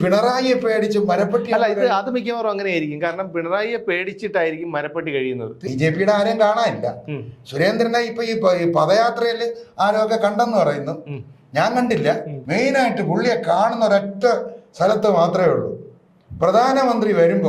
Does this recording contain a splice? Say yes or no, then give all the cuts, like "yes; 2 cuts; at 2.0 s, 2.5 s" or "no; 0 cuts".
yes; 2 cuts; at 5.5 s, 12.3 s